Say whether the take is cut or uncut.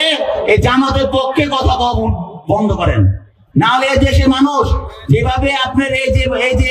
uncut